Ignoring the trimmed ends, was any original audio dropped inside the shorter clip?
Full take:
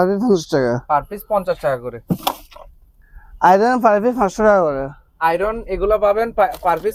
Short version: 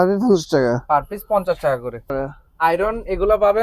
yes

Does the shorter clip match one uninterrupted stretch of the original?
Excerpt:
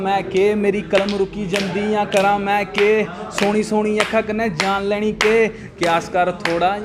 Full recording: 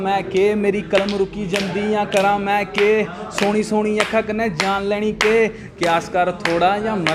yes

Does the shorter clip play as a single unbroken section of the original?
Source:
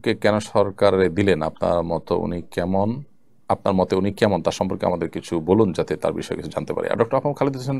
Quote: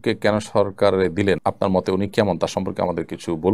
no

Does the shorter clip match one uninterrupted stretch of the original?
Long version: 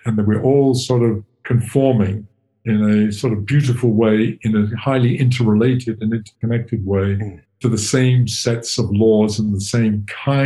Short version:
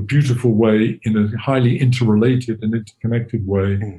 yes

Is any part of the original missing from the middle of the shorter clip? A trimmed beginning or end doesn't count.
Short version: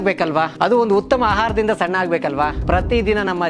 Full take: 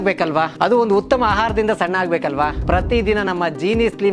no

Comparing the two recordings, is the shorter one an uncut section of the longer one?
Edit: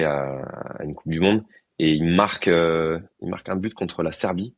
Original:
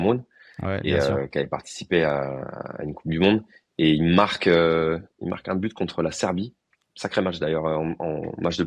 yes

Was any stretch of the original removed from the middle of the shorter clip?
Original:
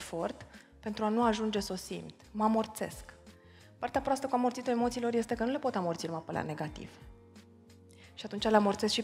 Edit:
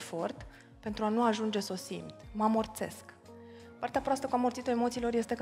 no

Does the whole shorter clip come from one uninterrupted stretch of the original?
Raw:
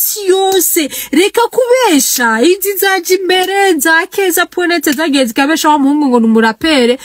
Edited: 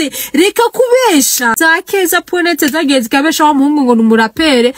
no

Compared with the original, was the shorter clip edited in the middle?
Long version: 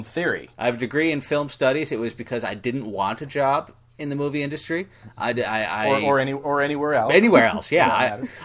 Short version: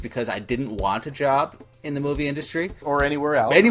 yes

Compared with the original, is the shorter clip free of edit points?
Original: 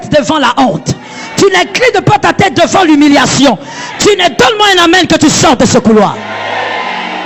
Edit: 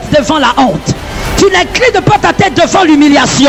yes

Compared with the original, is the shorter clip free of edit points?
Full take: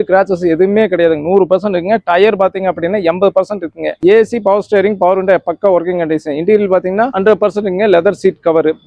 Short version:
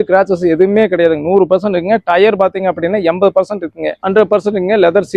no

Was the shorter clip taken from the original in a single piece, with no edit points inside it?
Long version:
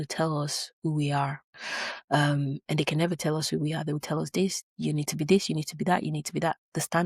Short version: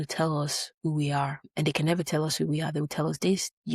no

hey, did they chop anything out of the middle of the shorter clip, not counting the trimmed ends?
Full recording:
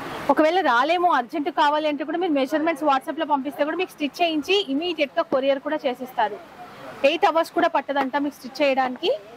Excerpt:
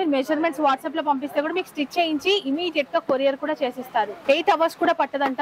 yes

